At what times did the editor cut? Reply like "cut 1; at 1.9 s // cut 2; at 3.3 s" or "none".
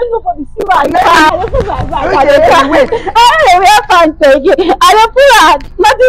cut 1; at 1.3 s

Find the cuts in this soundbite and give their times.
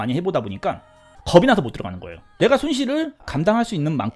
cut 1; at 2.3 s

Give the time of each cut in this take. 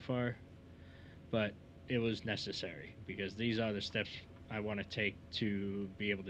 cut 1; at 1.7 s

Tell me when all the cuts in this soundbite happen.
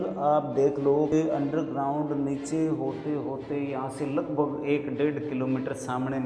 cut 1; at 1.1 s

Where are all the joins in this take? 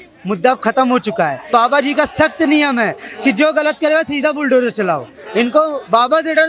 cut 1; at 1.5 s

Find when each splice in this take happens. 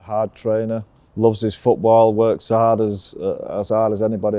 cut 1; at 1.0 s

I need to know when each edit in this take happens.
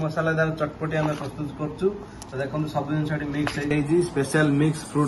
cut 1; at 3.7 s

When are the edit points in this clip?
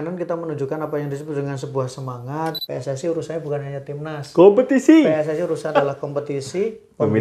cut 1; at 2.6 s

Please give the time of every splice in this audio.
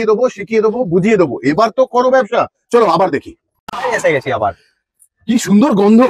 cut 1; at 2.6 s

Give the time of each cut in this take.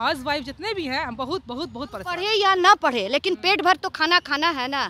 cut 1; at 2.2 s

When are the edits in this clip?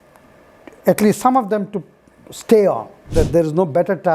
cut 1; at 3.1 s

